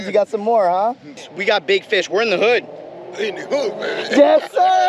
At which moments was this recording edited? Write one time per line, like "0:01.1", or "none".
0:01.2